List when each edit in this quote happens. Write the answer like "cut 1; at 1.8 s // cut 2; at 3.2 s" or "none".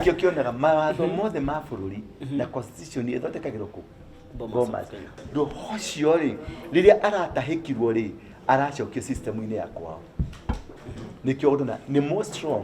cut 1; at 5.2 s

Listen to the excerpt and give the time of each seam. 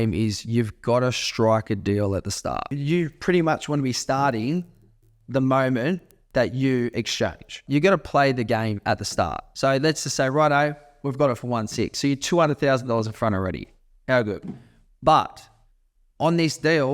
cut 1; at 2.7 s // cut 2; at 7.6 s // cut 3; at 9.4 s

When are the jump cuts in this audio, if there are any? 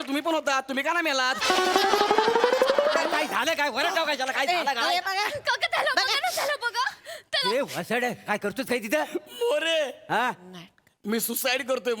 cut 1; at 3.2 s

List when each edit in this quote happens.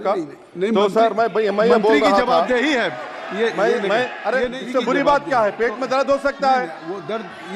cut 1; at 4.6 s

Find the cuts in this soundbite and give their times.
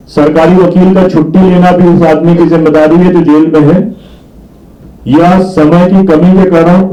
none

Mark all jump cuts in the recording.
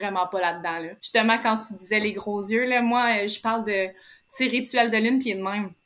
cut 1; at 0.9 s

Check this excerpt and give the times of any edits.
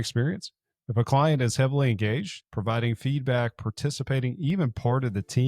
cut 1; at 2.4 s

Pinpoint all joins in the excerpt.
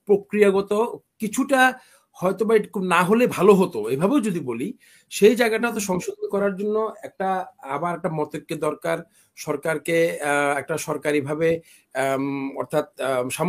none

